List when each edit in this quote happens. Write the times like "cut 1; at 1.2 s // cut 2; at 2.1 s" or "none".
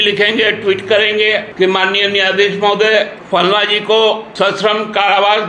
cut 1; at 1.5 s // cut 2; at 3.2 s // cut 3; at 4.3 s